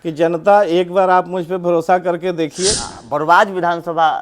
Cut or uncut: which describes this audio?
cut